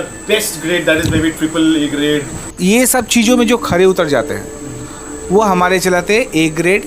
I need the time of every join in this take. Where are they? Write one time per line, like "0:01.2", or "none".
0:02.5